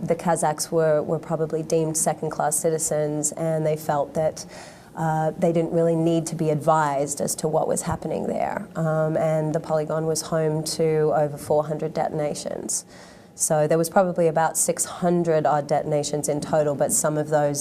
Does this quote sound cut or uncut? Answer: cut